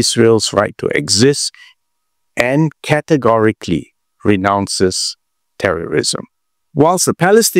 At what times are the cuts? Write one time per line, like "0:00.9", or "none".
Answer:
0:06.6